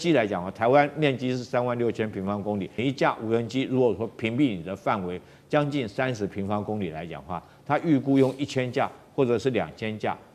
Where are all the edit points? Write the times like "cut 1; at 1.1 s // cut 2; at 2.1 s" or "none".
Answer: cut 1; at 2.8 s